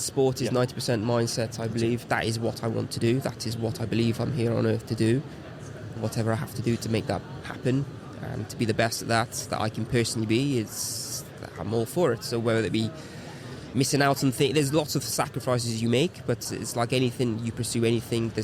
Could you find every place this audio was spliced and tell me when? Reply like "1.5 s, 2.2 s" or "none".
2.0 s, 6.0 s, 16.4 s